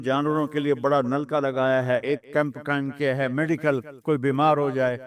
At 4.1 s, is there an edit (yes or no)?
no